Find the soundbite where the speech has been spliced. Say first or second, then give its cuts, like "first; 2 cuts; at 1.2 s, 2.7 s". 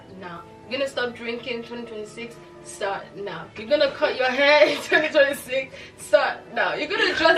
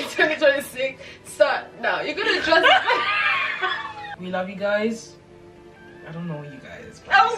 second; 1 cut; at 4.1 s